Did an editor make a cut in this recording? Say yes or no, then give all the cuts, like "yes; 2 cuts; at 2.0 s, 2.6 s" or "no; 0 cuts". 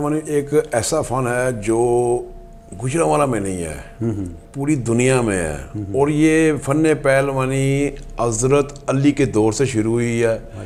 no; 0 cuts